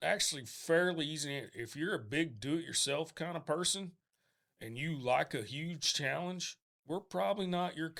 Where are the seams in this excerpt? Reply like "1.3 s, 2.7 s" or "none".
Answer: none